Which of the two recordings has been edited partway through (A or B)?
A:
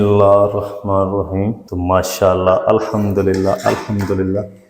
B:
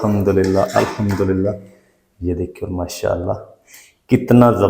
A